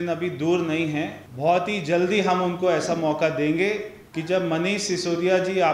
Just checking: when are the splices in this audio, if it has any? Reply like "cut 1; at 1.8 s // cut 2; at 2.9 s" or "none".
cut 1; at 1.2 s // cut 2; at 4.0 s